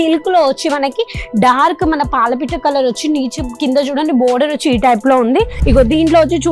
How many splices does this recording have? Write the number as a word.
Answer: one